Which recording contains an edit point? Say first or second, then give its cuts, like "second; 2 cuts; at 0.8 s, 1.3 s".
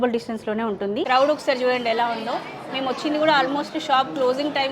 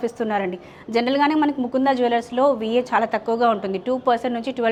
first; 1 cut; at 1.0 s